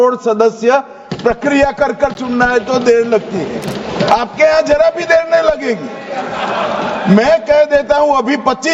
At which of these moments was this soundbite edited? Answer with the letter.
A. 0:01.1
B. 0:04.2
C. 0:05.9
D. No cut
D